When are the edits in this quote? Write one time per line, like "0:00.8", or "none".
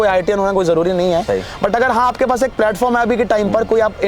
none